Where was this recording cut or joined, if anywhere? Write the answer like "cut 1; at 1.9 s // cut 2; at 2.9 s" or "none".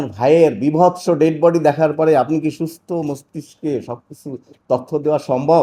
none